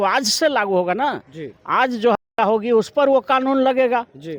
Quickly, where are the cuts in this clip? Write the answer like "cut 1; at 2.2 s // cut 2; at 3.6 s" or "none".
none